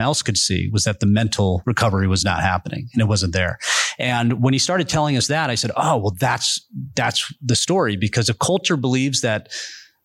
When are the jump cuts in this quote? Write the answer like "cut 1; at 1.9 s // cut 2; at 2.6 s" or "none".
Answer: cut 1; at 1.6 s

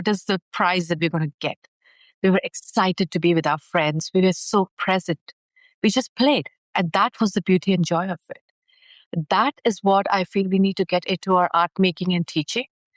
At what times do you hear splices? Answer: none

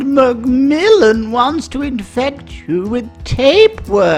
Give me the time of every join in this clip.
none

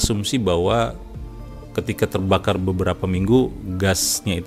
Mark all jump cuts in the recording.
none

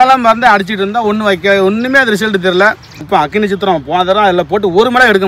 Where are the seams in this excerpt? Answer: cut 1; at 3.0 s

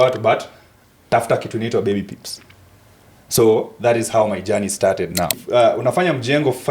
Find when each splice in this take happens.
cut 1; at 5.4 s

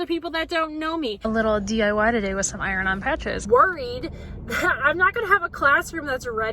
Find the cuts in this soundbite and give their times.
cut 1; at 1.2 s // cut 2; at 3.4 s

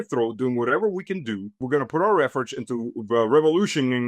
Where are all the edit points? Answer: cut 1; at 1.6 s

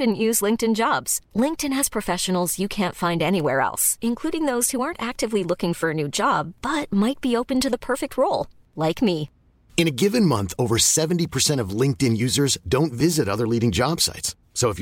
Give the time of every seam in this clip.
none

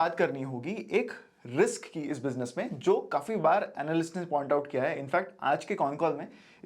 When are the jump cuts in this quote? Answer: none

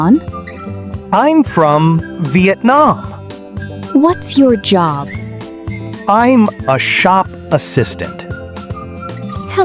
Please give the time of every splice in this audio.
none

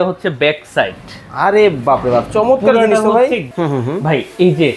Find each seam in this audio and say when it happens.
cut 1; at 3.5 s

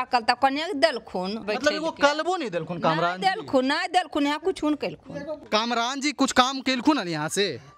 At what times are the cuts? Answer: cut 1; at 1.4 s // cut 2; at 5.4 s

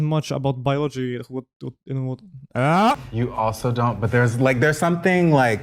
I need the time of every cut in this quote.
cut 1; at 3.0 s

